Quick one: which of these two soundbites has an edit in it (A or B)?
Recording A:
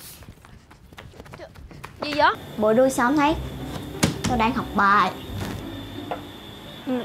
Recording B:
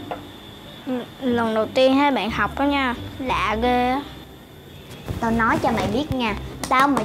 A